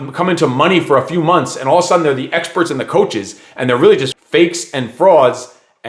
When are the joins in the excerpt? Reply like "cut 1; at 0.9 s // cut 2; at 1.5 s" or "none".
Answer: cut 1; at 4.1 s